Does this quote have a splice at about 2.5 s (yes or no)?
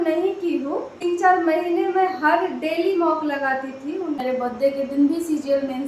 no